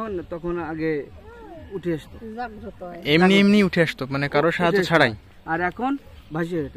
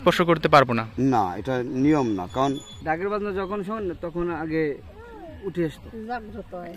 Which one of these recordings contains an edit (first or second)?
second